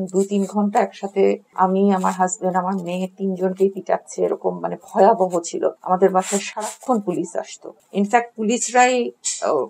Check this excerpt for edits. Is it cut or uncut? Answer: uncut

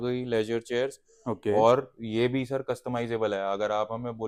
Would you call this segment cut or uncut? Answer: uncut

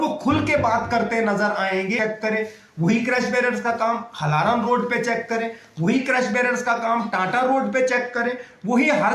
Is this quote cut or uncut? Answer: cut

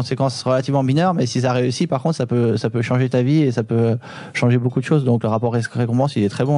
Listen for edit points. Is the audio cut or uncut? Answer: cut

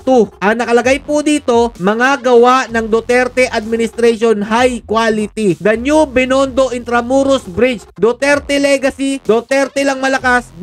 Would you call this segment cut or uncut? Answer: uncut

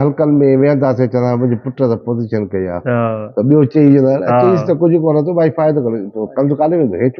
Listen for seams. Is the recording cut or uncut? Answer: uncut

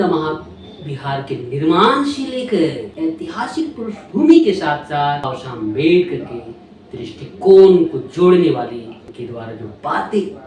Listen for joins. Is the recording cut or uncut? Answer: cut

